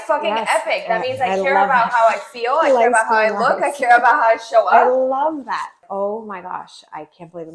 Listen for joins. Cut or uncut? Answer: cut